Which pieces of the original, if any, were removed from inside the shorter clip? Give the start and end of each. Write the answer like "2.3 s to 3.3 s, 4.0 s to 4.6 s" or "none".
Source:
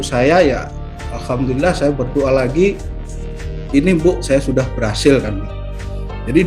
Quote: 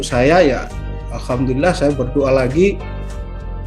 none